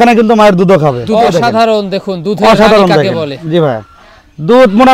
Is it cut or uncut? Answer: cut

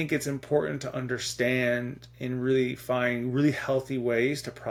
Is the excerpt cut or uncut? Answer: uncut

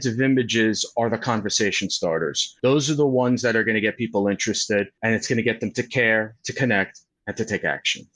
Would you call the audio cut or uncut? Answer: cut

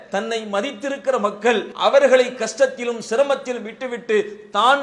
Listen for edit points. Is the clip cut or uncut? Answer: cut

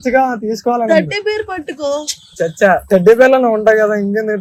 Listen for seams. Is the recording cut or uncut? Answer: uncut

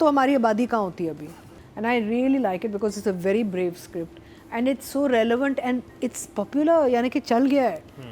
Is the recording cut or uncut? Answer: cut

